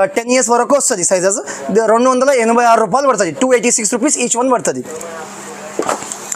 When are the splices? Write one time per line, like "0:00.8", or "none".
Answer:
none